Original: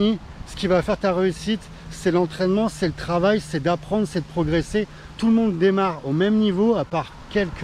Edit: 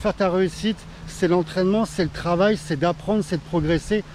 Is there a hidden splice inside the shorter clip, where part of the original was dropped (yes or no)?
no